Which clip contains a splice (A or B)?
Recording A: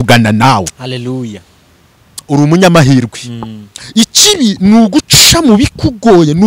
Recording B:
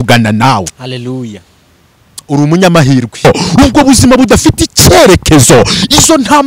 B